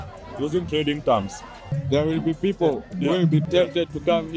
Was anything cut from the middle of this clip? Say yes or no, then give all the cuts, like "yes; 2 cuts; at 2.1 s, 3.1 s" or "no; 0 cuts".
yes; 2 cuts; at 1.7 s, 3.4 s